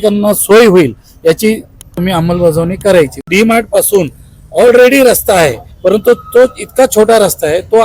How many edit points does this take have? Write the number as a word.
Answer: two